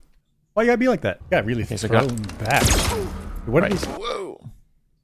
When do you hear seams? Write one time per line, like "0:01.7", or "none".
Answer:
0:01.2

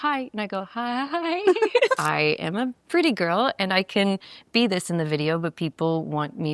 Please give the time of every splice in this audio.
0:02.0

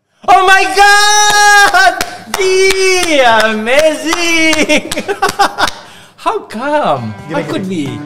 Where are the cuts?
none

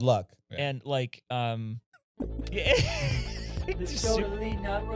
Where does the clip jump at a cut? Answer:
0:03.8

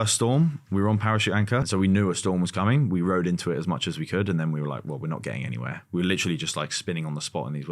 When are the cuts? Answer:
0:01.7

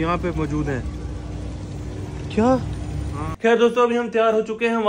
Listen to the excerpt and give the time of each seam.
0:03.3

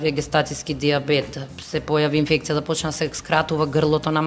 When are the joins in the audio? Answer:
none

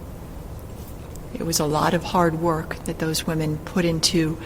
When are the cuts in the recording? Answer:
0:01.0

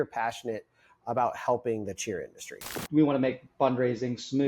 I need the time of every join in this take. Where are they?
0:02.8

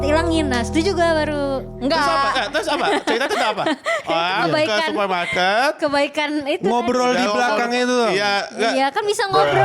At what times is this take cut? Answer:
none

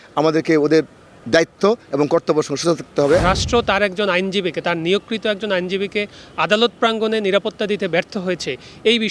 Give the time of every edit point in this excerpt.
0:03.2

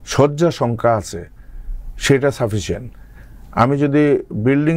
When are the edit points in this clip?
none

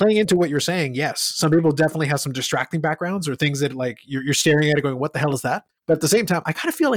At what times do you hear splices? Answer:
0:05.7

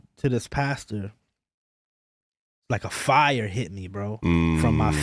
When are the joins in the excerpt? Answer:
none

